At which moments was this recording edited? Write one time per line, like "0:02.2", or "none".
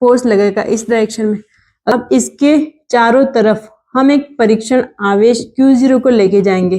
0:01.9

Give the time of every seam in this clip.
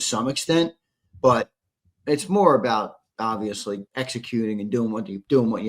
0:03.8

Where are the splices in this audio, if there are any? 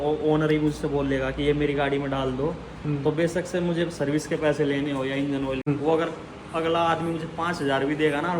0:05.7

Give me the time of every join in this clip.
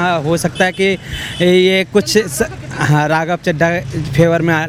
none

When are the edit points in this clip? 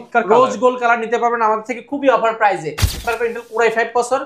0:03.0

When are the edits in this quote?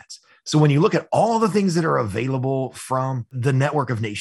0:03.3

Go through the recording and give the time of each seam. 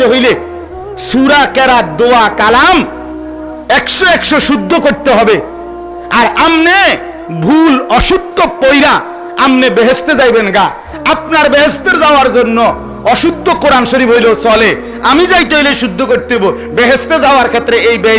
none

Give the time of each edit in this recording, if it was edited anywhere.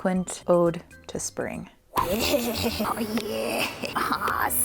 0:02.9
0:03.9

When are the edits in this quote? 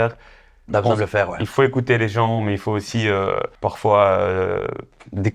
0:03.5

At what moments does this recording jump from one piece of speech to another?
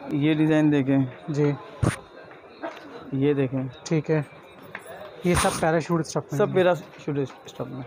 none

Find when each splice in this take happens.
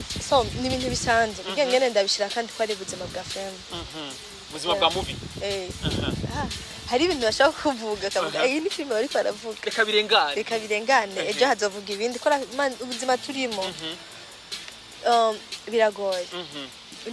none

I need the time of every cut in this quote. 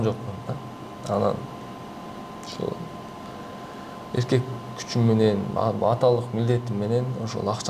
none

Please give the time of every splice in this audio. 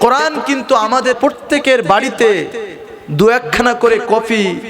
0:01.2

